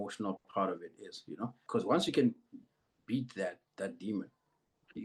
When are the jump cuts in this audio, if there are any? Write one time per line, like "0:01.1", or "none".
0:01.6